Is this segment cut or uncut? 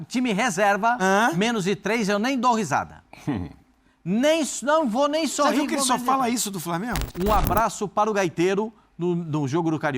cut